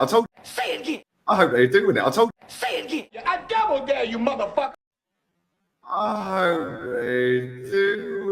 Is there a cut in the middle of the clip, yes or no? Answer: yes